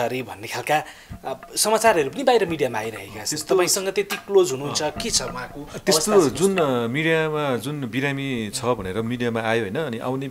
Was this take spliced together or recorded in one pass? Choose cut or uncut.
uncut